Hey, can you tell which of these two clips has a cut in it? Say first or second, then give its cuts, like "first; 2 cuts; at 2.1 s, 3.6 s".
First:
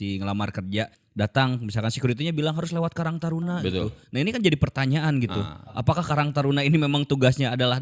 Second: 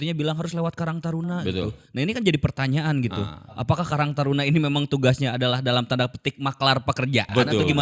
first; 1 cut; at 1.0 s